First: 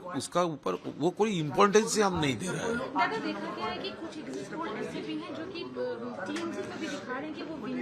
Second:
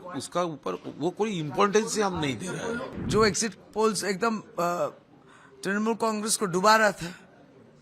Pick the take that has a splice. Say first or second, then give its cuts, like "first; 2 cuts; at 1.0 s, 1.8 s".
second; 1 cut; at 2.9 s